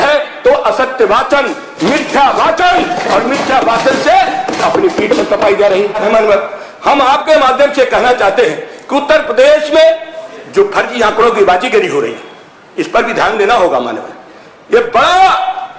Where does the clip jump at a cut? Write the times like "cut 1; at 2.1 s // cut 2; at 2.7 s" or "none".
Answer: none